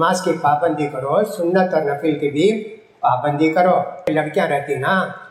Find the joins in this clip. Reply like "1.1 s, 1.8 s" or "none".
4.1 s